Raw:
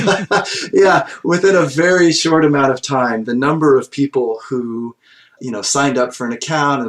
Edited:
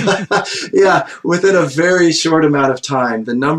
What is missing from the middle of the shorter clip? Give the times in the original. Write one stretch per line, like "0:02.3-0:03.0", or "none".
none